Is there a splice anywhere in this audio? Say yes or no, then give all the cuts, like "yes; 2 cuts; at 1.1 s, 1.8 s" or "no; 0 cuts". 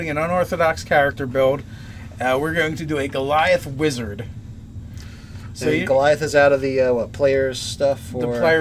no; 0 cuts